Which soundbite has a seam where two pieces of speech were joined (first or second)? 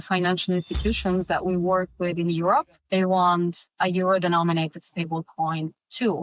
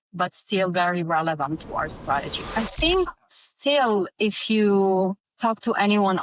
second